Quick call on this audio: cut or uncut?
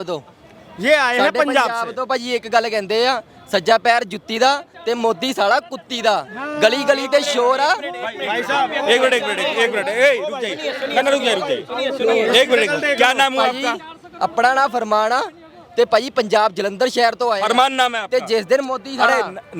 uncut